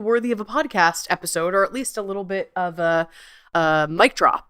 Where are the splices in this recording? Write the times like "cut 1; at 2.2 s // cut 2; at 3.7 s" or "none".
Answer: cut 1; at 3.5 s

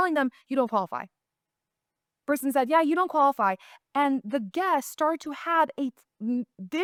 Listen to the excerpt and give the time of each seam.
none

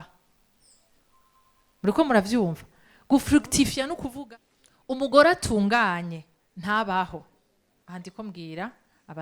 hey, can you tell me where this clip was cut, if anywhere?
cut 1; at 4.1 s

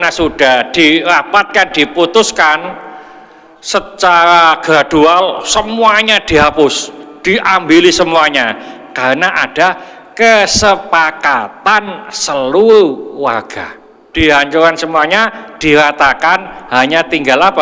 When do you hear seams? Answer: cut 1; at 14.0 s

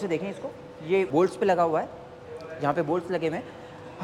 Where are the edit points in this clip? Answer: cut 1; at 1.1 s

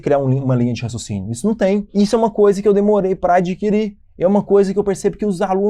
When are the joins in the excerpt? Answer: cut 1; at 1.9 s

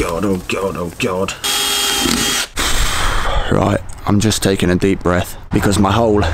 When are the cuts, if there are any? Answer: cut 1; at 1.4 s // cut 2; at 2.5 s // cut 3; at 5.4 s

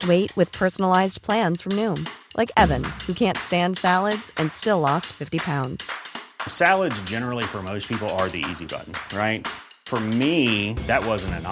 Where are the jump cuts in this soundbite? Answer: none

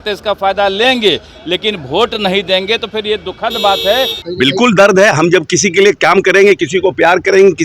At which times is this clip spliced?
cut 1; at 4.2 s

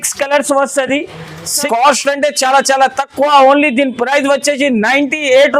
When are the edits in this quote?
cut 1; at 1.7 s

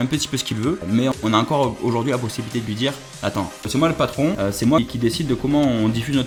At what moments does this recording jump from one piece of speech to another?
none

